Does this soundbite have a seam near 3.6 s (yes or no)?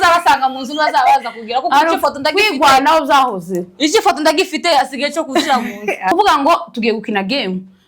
no